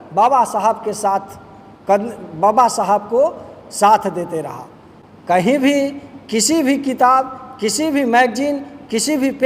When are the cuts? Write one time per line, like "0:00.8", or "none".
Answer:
none